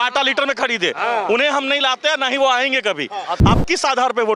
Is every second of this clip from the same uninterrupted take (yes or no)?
no